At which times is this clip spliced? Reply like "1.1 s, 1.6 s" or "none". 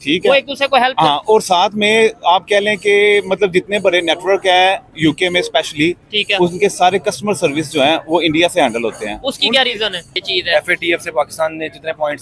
10.1 s